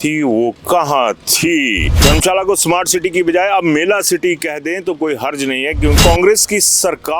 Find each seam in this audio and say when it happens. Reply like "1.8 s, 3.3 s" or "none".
2.0 s, 6.0 s